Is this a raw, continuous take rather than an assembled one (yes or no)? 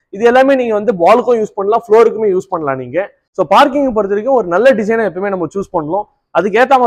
no